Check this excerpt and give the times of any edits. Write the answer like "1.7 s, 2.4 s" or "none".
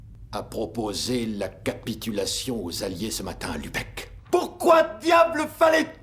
none